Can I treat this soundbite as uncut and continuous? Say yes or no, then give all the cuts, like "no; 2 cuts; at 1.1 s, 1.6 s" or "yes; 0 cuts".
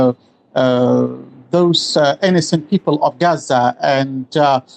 yes; 0 cuts